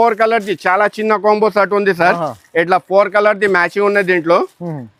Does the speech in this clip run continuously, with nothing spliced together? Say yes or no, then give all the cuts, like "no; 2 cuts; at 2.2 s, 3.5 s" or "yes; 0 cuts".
yes; 0 cuts